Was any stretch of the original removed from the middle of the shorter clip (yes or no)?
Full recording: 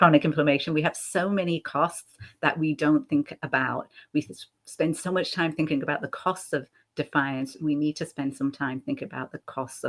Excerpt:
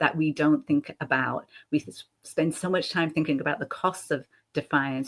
no